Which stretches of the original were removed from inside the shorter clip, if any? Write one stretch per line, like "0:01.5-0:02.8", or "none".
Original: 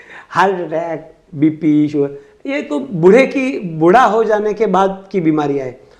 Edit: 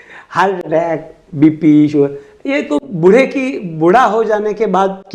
none